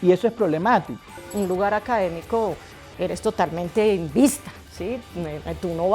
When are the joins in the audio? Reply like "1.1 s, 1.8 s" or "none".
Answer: 1.2 s